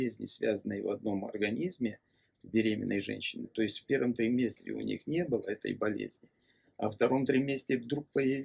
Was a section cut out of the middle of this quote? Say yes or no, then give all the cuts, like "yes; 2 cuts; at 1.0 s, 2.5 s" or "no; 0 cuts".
no; 0 cuts